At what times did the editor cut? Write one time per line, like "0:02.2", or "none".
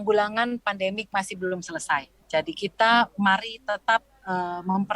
0:02.2